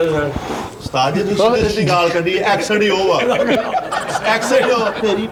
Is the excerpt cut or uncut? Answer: uncut